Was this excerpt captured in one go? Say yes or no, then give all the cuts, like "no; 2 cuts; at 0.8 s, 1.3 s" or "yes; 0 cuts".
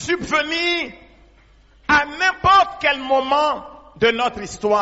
yes; 0 cuts